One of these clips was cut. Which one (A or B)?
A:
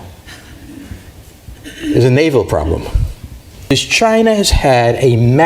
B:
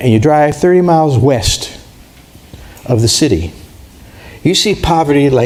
A